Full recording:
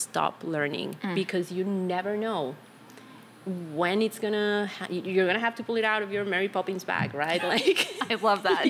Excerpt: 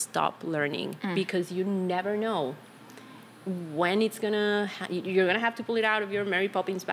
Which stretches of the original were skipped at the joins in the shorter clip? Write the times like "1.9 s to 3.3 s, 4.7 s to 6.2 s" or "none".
none

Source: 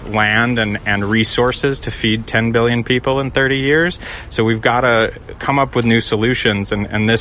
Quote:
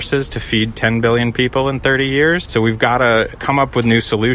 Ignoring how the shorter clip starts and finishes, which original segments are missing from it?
4.0 s to 4.3 s, 5.2 s to 5.4 s

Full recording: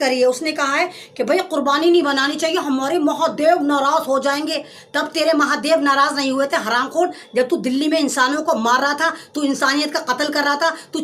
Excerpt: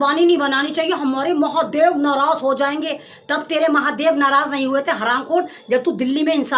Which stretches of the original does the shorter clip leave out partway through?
none

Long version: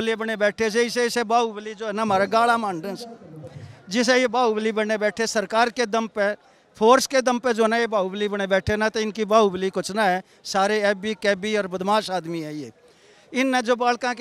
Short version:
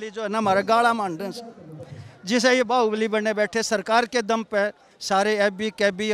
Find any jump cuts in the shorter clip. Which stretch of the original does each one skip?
6.6 s to 10.4 s

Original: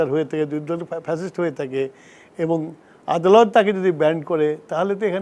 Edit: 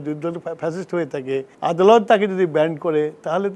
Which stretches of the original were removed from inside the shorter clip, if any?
2.0 s to 3.0 s

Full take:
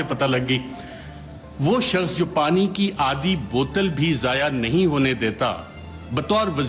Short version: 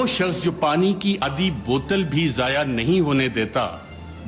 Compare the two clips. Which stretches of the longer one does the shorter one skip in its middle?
3.0 s to 3.1 s

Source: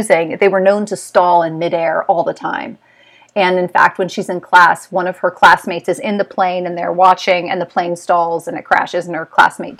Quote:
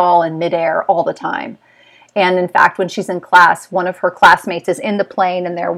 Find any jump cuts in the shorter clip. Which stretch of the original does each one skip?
none

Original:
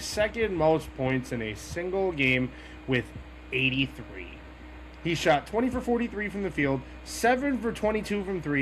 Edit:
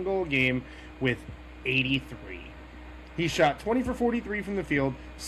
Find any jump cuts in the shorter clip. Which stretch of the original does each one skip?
none

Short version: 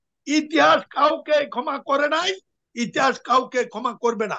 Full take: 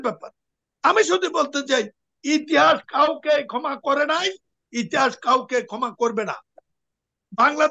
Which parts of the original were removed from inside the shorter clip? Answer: none

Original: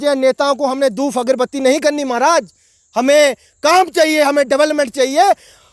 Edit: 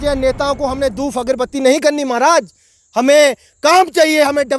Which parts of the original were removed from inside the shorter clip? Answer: none

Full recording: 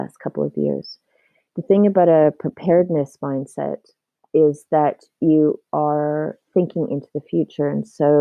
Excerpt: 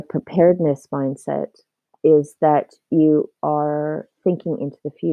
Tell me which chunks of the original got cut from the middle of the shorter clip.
none

